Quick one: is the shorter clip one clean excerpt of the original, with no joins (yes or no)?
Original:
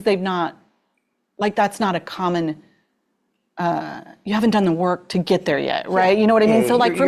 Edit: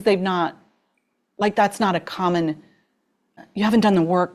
no